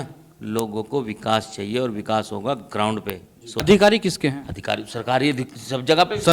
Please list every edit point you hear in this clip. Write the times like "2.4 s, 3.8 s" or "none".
3.6 s